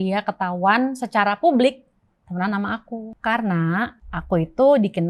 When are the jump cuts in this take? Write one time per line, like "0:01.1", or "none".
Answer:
0:03.1
0:04.1